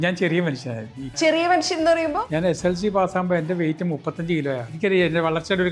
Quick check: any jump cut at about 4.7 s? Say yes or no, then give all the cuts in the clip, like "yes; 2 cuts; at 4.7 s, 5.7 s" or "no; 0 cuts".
yes; 3 cuts; at 1.1 s, 2.2 s, 4.7 s